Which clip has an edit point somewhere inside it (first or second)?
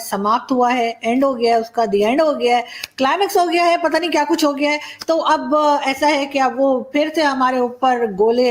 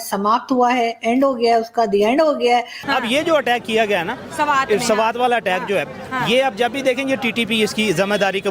second